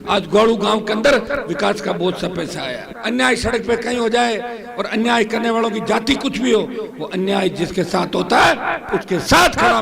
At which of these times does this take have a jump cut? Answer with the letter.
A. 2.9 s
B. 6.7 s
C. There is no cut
A